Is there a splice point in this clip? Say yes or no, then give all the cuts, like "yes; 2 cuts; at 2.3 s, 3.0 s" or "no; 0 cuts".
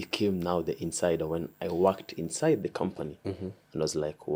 no; 0 cuts